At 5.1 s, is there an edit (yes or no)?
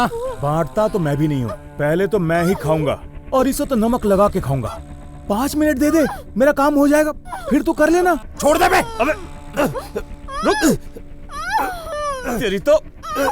no